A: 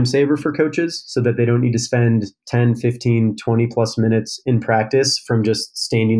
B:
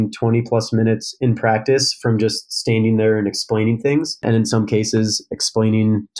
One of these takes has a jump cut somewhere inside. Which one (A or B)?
B